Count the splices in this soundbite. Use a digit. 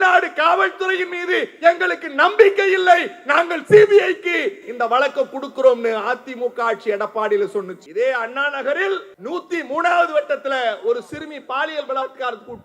2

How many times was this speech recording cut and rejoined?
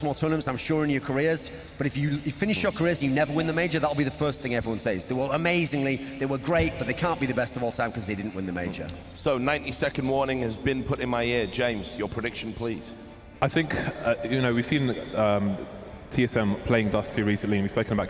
0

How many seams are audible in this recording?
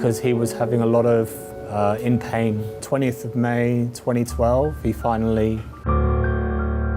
1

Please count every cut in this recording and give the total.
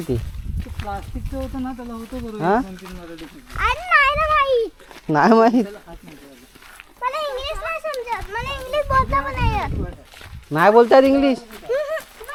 0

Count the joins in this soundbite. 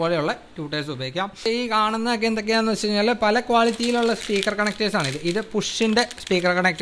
1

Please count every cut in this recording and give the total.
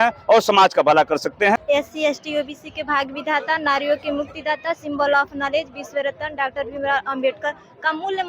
1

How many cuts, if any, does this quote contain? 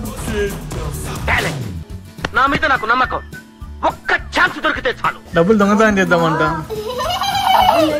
0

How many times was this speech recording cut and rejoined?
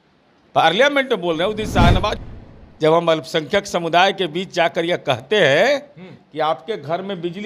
1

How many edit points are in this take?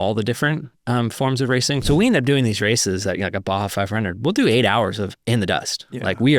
1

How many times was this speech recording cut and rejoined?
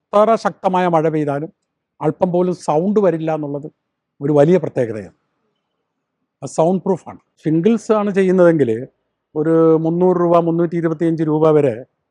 0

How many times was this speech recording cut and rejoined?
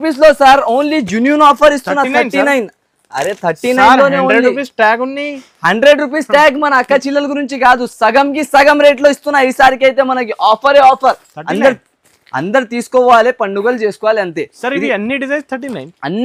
0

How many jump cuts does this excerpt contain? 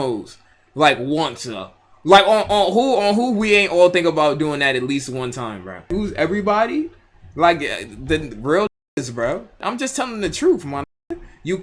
2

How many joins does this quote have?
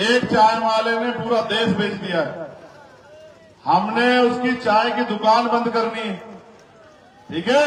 0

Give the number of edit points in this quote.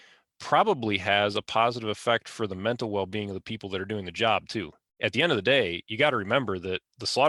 1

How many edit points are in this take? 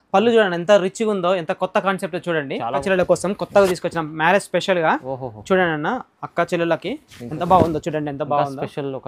1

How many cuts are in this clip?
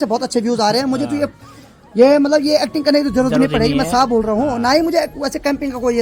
0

